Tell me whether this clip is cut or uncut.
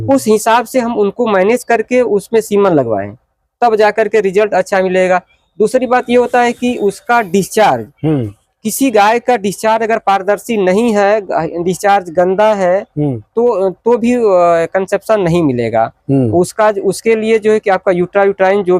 uncut